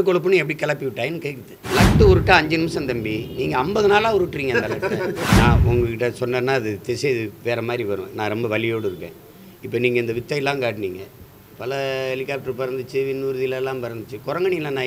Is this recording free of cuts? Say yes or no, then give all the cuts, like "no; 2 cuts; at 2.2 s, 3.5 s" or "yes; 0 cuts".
no; 2 cuts; at 1.5 s, 5.3 s